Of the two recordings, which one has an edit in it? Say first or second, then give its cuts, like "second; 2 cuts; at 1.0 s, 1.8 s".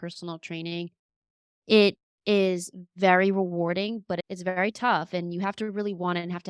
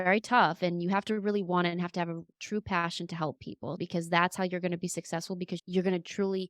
second; 2 cuts; at 3.8 s, 5.6 s